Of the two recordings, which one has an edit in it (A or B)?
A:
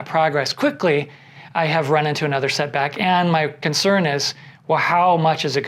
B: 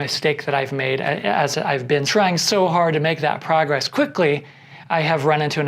B